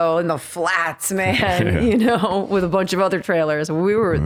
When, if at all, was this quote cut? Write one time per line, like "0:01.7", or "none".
none

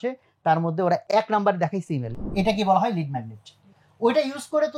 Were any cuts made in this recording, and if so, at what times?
0:01.0
0:02.1

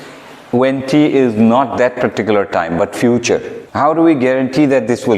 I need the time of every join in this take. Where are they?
0:03.6

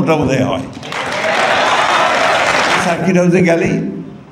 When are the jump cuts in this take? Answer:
0:02.9

